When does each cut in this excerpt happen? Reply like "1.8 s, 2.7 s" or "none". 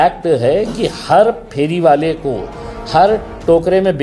none